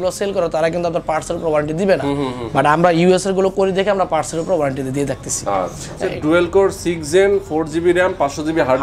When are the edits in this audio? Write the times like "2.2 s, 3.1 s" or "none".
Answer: 6.0 s